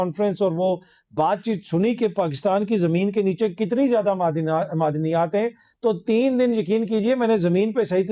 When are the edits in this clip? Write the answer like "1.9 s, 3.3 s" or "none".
none